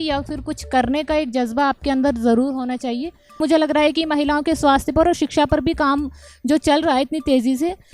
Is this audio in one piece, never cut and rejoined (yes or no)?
no